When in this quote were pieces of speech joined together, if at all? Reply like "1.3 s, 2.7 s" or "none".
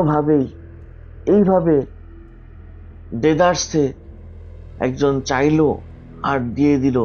none